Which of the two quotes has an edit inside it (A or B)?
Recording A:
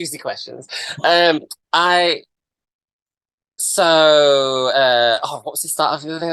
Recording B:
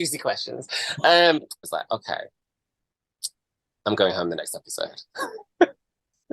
B